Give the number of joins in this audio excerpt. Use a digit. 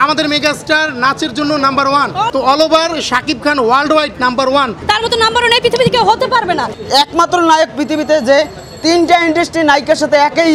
3